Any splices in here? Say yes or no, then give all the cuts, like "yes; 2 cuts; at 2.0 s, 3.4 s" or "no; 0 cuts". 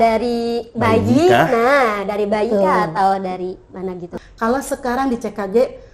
yes; 1 cut; at 4.1 s